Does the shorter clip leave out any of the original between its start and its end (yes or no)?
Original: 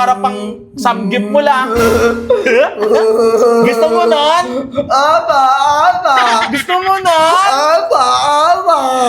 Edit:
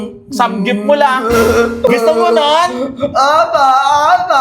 yes